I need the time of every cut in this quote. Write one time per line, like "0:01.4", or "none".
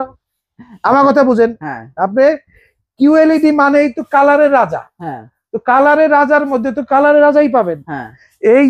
none

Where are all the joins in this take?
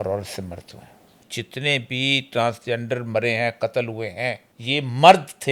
0:01.3
0:04.5

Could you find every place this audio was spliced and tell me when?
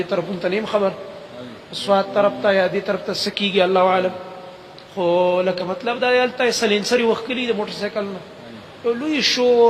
none

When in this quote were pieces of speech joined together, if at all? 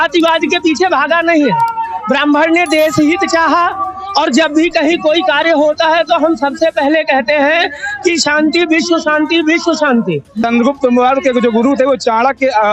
0:10.4

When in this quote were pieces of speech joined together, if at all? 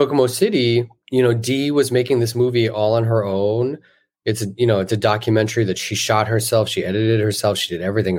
0:01.0

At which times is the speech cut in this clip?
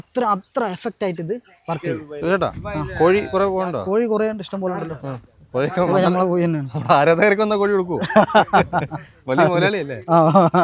0:01.9

